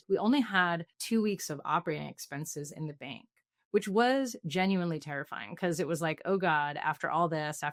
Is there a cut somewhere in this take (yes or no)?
no